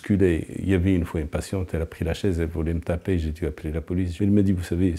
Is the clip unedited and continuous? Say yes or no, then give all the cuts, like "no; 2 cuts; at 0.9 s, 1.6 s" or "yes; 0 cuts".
yes; 0 cuts